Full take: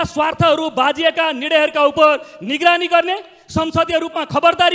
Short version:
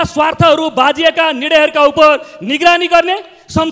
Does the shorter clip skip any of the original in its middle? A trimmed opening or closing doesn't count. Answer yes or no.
no